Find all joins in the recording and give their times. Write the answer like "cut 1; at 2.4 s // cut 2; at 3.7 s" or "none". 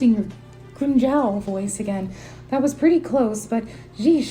none

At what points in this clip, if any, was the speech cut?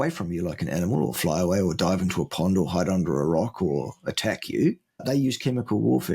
cut 1; at 5.0 s

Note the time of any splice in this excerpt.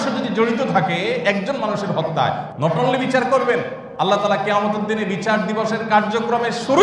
cut 1; at 2.5 s // cut 2; at 3.8 s

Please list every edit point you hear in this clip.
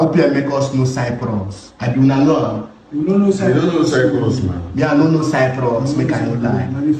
none

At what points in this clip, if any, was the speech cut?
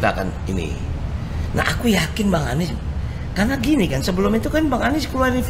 none

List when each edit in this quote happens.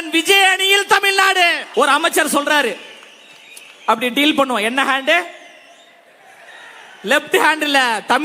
cut 1; at 1.6 s

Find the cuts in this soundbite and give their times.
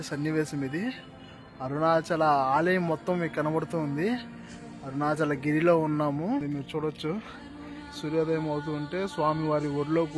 cut 1; at 6.5 s

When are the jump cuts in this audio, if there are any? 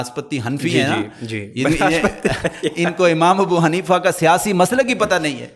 none

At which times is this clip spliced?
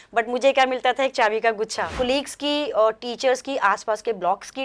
cut 1; at 1.9 s

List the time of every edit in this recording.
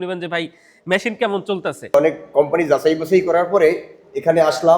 cut 1; at 1.9 s

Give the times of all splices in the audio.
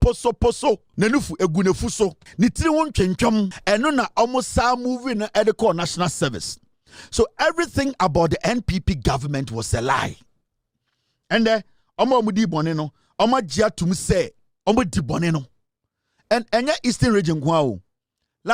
cut 1; at 0.9 s // cut 2; at 2.2 s // cut 3; at 3.6 s

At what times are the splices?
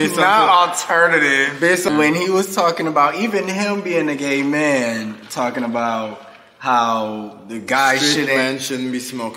cut 1; at 1.9 s

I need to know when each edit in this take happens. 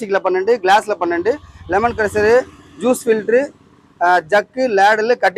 none

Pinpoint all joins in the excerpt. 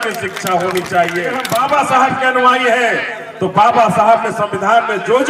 cut 1; at 1.4 s

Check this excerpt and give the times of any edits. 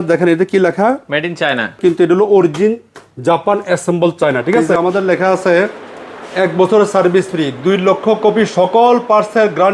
cut 1; at 1.8 s // cut 2; at 4.7 s

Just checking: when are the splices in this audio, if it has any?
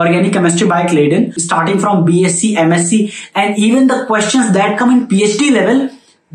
cut 1; at 1.4 s

